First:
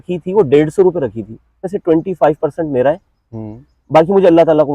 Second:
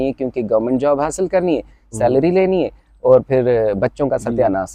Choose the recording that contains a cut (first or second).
first